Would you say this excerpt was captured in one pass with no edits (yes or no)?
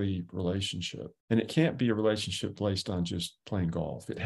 no